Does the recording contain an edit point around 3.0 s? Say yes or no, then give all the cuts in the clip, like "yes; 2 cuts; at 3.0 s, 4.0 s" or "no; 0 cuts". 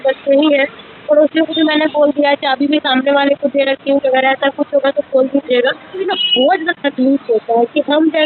no; 1 cut; at 6.1 s